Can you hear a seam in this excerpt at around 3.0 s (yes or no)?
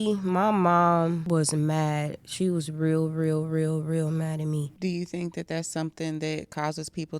no